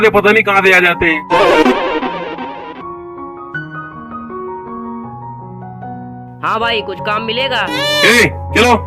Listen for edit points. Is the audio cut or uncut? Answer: uncut